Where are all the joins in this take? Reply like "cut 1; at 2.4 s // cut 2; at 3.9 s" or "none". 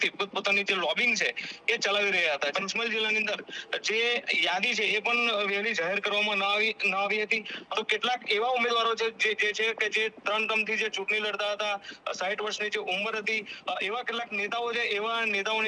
cut 1; at 2.5 s // cut 2; at 7.6 s